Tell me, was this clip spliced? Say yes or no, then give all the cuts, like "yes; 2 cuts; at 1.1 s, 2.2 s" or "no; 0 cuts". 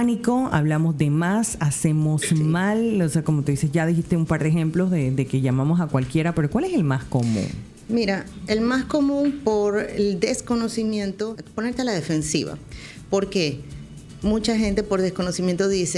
yes; 1 cut; at 11.4 s